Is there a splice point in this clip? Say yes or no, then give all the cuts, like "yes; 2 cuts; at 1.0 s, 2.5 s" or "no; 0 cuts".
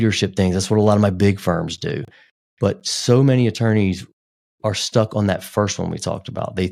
no; 0 cuts